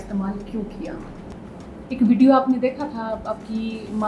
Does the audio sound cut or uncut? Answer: cut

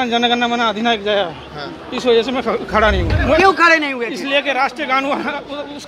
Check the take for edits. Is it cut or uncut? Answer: cut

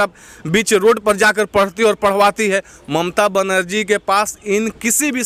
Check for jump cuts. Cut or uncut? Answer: uncut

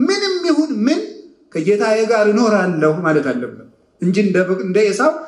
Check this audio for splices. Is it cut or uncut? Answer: uncut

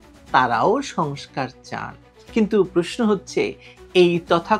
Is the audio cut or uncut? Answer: uncut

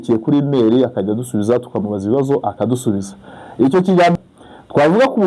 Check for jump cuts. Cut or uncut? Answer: cut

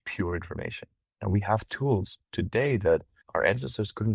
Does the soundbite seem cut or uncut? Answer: cut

